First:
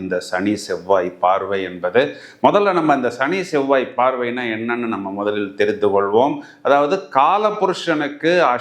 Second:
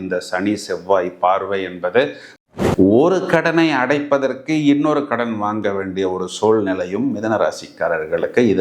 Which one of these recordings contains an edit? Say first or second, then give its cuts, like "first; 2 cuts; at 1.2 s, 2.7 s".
second; 1 cut; at 2.4 s